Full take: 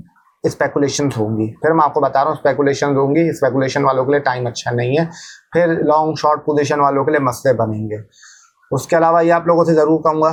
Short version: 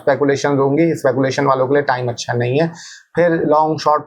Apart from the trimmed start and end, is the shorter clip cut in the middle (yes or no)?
no